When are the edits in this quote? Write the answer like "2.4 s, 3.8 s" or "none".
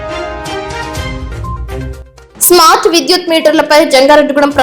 1.2 s